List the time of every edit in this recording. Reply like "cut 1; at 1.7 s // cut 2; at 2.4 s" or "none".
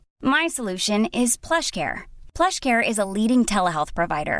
none